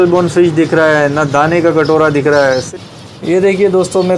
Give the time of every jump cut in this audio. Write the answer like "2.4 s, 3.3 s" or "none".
2.7 s